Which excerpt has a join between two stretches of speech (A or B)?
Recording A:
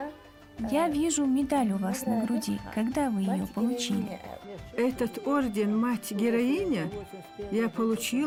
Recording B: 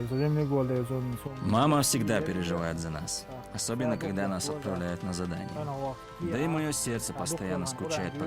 B